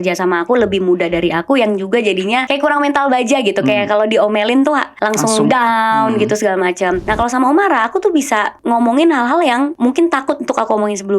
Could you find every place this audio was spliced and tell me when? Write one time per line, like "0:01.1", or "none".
0:02.5
0:04.9
0:07.1
0:08.5
0:09.7